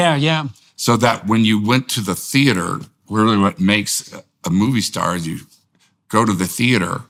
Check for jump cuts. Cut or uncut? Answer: uncut